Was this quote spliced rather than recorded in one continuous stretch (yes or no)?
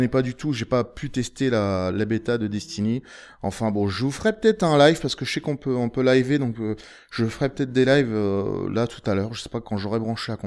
yes